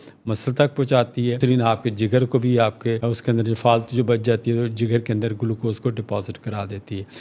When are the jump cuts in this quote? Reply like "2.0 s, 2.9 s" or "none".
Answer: 1.4 s, 3.1 s